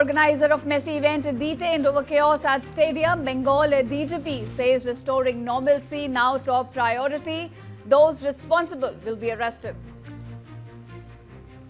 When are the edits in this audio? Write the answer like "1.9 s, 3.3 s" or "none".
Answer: none